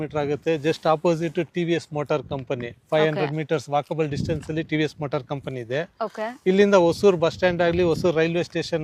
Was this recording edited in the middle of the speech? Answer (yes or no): no